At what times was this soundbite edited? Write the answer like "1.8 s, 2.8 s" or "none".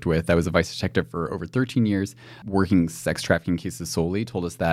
2.3 s